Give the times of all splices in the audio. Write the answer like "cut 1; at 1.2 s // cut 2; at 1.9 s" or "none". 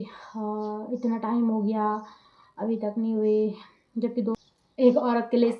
cut 1; at 4.4 s